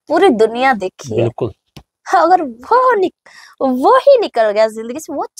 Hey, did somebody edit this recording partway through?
no; 0 cuts

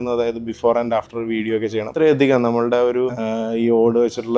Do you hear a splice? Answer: yes; 2 cuts; at 1.9 s, 3.2 s

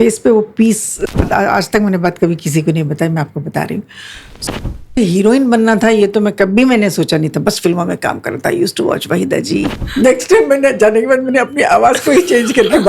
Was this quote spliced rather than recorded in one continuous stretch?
yes; 3 cuts; at 1.2 s, 4.6 s, 9.8 s

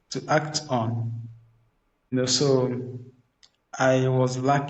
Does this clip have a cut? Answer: yes; 1 cut; at 2.1 s

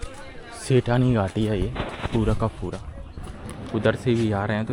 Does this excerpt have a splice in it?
no; 0 cuts

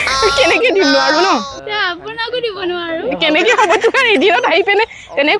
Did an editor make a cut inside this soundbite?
no; 0 cuts

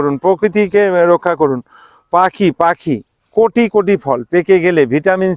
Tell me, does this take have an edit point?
no; 0 cuts

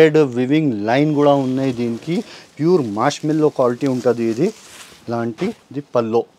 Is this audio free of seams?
yes; 0 cuts

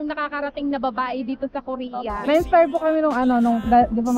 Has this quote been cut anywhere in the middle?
yes; 1 cut; at 2.2 s

